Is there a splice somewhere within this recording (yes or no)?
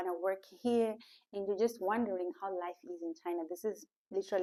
no